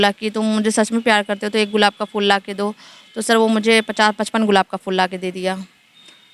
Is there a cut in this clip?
no; 0 cuts

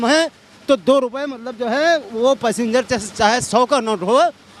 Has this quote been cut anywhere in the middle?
no; 0 cuts

